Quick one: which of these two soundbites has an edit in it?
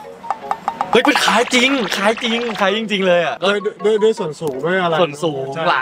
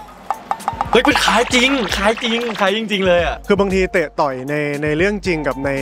second; 1 cut; at 3.3 s

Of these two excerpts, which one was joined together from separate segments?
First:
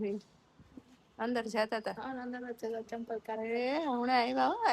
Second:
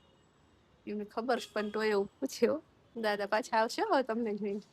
second; 1 cut; at 2.9 s

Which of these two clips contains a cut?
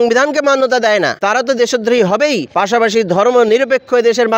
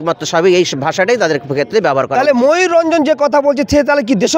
first; 2 cuts; at 1.2 s, 2.5 s

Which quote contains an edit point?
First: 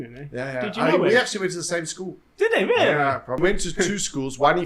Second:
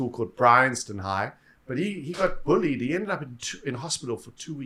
first; 1 cut; at 3.4 s

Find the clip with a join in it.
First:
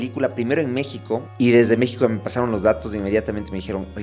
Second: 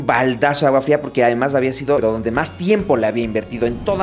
first; 1 cut; at 1.3 s

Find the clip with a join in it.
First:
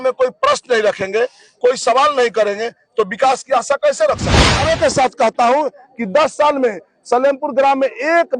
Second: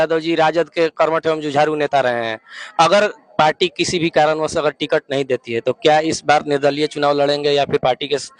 first; 1 cut; at 4.6 s

